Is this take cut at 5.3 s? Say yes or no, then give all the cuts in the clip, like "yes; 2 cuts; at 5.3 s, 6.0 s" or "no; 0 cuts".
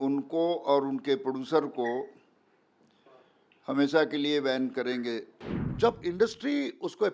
yes; 1 cut; at 5.3 s